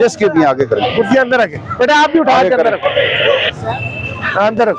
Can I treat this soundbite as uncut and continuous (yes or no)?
yes